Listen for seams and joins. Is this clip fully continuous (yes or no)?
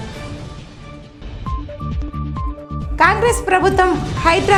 yes